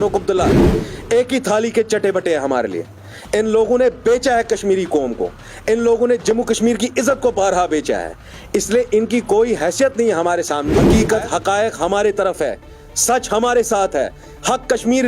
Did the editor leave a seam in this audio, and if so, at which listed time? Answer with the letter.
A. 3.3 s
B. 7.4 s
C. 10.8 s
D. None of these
C